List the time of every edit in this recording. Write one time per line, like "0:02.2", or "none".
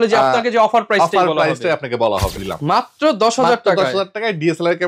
0:02.5